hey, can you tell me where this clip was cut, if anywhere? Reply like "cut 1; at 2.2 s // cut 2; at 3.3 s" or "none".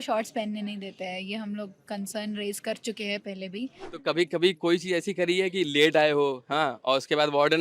cut 1; at 3.9 s